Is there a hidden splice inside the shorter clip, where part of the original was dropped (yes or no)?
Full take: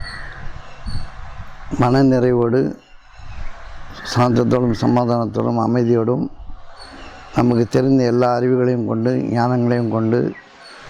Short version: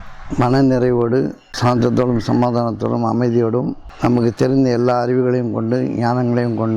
yes